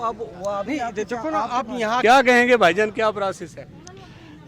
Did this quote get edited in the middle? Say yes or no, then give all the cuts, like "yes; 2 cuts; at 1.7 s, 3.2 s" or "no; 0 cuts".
yes; 1 cut; at 2.0 s